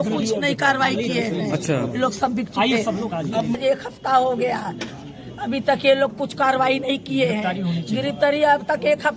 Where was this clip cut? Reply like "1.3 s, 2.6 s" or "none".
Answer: 3.6 s